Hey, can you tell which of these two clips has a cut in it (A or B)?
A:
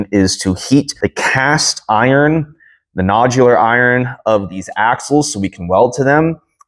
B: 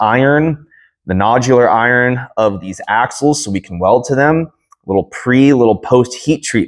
A